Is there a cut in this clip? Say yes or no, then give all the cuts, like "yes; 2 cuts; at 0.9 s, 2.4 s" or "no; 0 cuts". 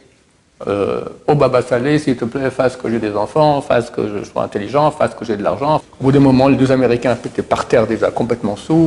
yes; 1 cut; at 5.8 s